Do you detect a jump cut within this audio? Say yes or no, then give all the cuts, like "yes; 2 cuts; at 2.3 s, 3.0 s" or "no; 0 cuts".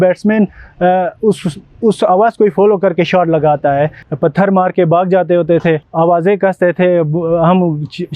yes; 2 cuts; at 4.0 s, 5.9 s